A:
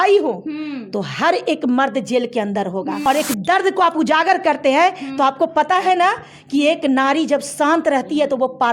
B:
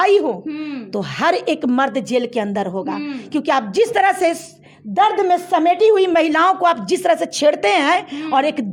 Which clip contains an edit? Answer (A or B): A